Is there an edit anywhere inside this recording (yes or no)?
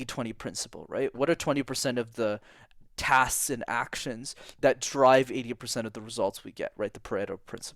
yes